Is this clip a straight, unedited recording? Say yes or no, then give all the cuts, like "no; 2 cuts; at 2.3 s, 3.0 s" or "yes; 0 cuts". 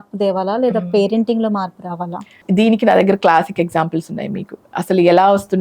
no; 1 cut; at 2.4 s